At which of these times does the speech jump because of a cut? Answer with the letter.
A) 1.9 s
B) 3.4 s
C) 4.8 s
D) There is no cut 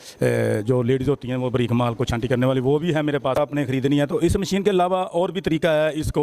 B